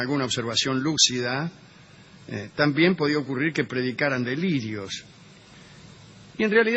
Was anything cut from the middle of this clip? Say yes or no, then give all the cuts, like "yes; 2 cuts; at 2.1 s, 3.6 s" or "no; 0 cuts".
no; 0 cuts